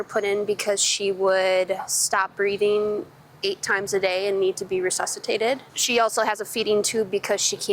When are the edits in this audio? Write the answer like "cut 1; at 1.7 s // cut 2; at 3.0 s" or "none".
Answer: cut 1; at 5.7 s